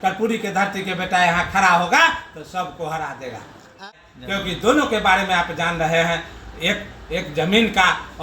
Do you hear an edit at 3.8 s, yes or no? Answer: yes